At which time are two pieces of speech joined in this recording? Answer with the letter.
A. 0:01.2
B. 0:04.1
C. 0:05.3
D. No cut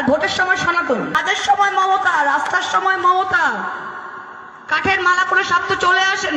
A